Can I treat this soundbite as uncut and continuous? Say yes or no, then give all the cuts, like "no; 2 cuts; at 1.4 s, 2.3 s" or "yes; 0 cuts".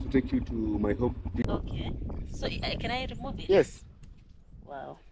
no; 1 cut; at 1.4 s